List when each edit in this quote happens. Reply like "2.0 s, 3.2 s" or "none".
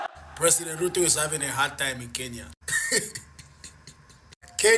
2.4 s